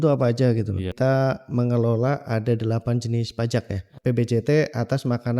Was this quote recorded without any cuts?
no; 2 cuts; at 0.9 s, 3.9 s

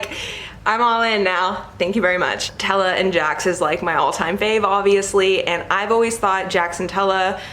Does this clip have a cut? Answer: no; 0 cuts

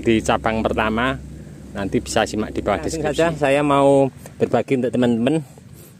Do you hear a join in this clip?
yes; 1 cut; at 3.0 s

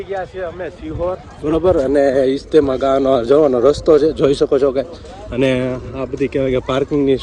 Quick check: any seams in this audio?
no; 0 cuts

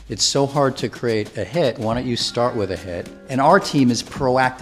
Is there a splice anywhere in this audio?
yes; 1 cut; at 3.2 s

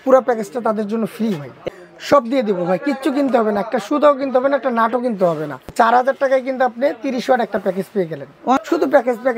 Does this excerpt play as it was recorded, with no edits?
no; 3 cuts; at 1.5 s, 5.6 s, 8.6 s

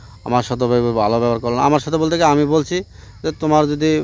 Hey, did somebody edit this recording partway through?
no; 0 cuts

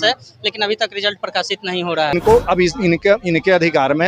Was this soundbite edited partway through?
yes; 1 cut; at 2.1 s

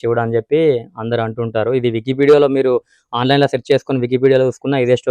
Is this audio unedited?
yes; 0 cuts

